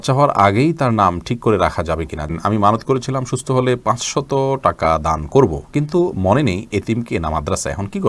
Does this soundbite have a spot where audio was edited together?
yes; 1 cut; at 2.3 s

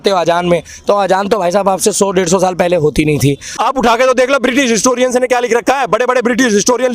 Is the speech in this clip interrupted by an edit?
yes; 1 cut; at 3.5 s

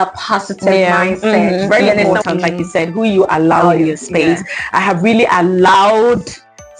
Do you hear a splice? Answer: yes; 1 cut; at 2.1 s

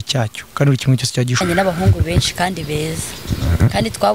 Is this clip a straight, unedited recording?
no; 1 cut; at 1.4 s

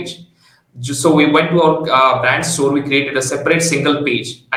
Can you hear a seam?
no; 0 cuts

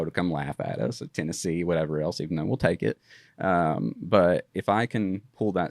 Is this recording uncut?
no; 1 cut; at 4.5 s

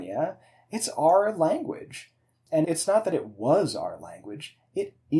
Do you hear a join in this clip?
yes; 1 cut; at 2.6 s

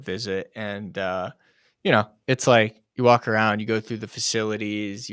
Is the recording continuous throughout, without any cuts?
yes; 0 cuts

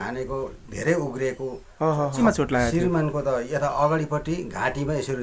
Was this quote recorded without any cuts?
no; 1 cut; at 2.2 s

